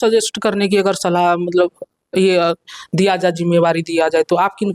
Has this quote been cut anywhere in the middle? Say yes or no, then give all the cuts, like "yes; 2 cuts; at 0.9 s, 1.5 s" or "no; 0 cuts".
no; 0 cuts